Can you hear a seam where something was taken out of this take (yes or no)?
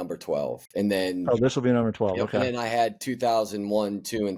no